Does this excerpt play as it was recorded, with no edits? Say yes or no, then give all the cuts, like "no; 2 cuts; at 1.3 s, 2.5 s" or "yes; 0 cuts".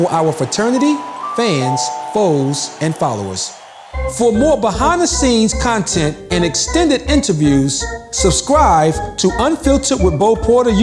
no; 1 cut; at 3.5 s